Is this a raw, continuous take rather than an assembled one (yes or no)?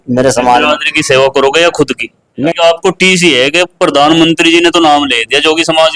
no